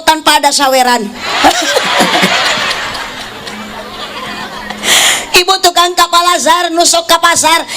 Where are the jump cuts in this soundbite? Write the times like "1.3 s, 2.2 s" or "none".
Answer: none